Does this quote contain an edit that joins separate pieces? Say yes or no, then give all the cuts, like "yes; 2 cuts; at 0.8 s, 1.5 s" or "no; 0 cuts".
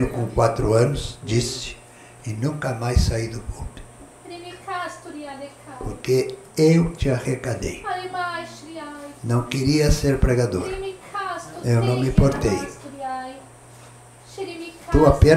no; 0 cuts